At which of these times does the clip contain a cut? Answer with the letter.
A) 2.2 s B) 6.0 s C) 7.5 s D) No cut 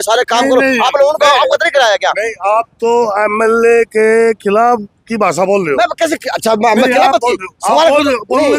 D